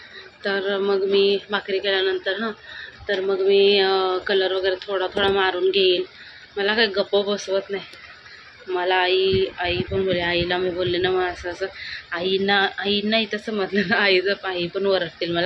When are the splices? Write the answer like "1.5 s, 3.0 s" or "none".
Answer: none

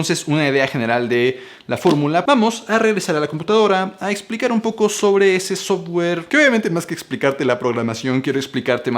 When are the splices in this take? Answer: 2.2 s

